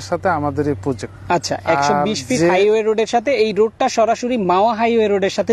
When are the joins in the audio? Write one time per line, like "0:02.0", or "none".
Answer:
0:01.1